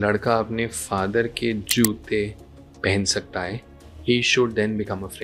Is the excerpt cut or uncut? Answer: uncut